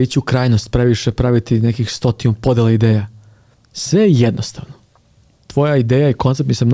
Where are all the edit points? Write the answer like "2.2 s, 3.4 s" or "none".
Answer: none